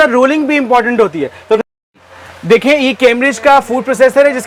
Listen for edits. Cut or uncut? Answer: uncut